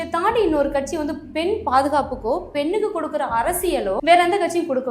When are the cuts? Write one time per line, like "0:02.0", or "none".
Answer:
0:04.0